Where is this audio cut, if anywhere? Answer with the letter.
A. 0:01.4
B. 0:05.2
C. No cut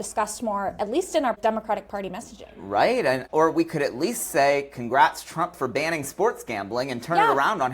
A